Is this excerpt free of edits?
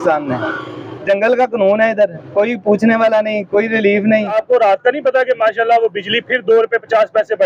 no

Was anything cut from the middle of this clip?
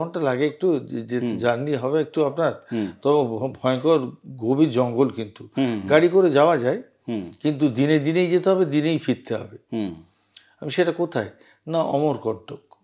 no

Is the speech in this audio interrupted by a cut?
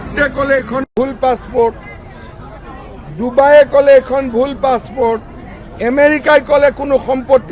no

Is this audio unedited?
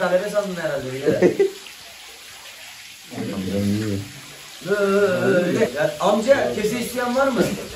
no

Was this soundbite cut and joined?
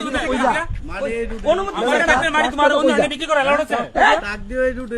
no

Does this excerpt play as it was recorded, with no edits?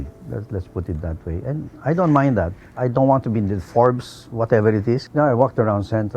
no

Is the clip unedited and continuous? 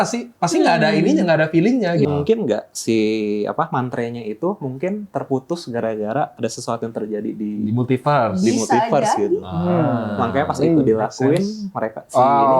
no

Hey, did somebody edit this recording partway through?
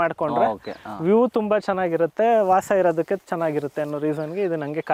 no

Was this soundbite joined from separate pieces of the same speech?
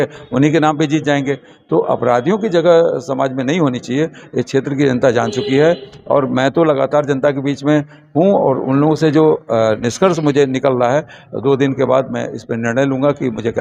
no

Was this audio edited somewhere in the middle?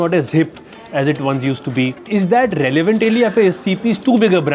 yes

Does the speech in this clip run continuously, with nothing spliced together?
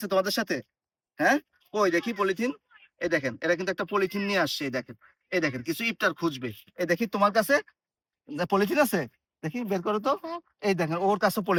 yes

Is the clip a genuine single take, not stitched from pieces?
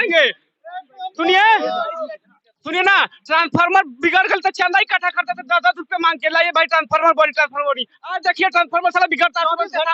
yes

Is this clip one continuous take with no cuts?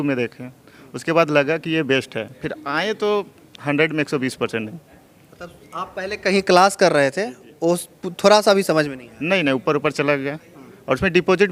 yes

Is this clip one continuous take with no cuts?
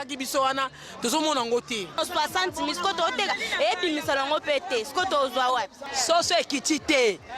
no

